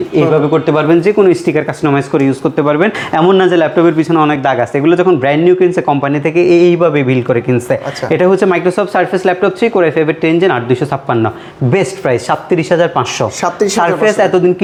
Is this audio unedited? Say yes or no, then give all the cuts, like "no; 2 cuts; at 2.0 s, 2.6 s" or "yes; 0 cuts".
yes; 0 cuts